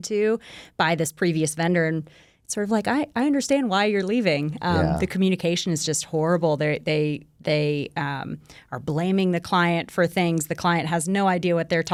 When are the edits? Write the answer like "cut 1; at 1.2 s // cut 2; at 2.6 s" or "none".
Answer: none